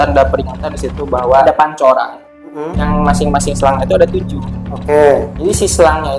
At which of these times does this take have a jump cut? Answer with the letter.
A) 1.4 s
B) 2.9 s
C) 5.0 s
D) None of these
A